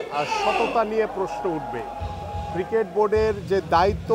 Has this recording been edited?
no; 0 cuts

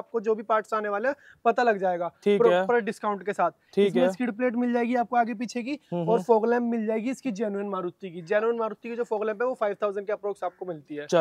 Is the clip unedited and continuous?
yes; 0 cuts

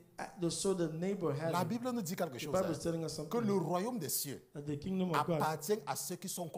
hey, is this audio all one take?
yes; 0 cuts

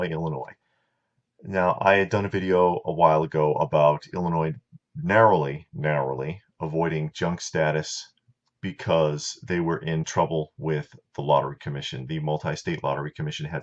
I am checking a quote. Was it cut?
yes; 1 cut; at 10.0 s

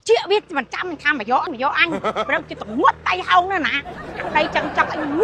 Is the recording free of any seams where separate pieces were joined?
no; 1 cut; at 1.5 s

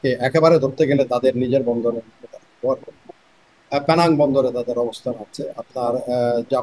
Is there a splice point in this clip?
no; 0 cuts

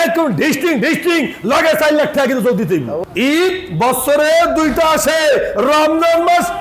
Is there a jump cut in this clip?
yes; 1 cut; at 3.0 s

